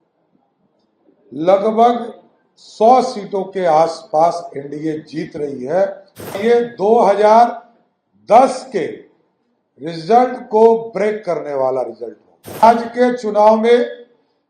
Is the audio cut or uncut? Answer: cut